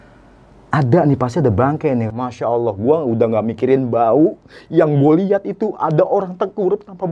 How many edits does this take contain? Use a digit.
1